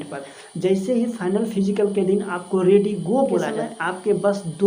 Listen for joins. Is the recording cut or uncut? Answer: cut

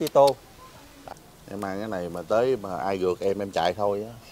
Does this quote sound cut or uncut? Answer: cut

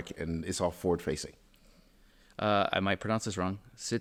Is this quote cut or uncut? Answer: uncut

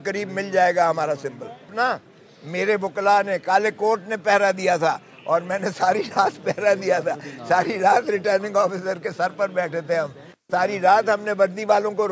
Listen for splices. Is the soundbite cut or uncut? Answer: cut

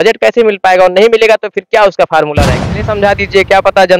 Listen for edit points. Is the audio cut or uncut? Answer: cut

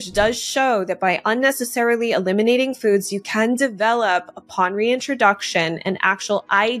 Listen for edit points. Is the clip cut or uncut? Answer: uncut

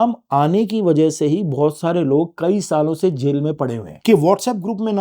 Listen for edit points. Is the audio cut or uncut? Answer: cut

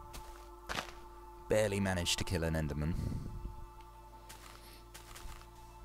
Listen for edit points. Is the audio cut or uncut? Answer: cut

